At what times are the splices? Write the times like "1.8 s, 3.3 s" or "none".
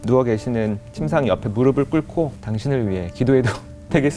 2.3 s